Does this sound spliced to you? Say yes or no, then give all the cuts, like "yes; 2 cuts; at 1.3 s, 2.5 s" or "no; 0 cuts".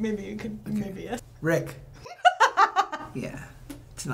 no; 0 cuts